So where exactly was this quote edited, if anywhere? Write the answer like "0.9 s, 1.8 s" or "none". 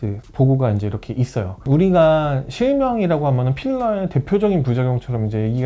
none